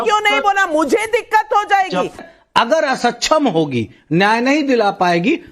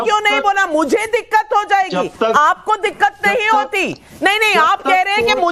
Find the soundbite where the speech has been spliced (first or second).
first